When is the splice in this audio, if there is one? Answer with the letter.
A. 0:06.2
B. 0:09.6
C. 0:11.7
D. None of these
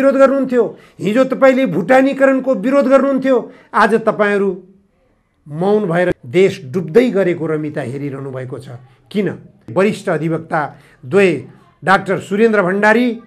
B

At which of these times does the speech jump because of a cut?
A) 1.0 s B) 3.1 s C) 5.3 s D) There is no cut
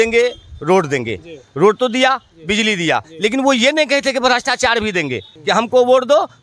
C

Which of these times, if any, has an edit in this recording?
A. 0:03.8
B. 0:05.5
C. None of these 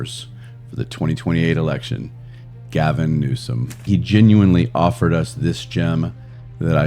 A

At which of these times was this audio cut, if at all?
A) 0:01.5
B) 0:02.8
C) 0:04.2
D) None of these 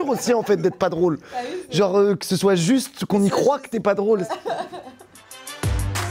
C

